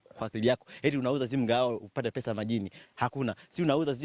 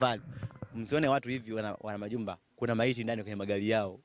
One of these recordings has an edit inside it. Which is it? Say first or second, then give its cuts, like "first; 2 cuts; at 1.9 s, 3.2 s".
second; 1 cut; at 1.2 s